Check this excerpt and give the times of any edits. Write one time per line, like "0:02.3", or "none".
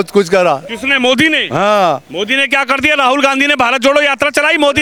none